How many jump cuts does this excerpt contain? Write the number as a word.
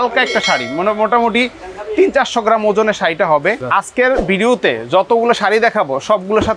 one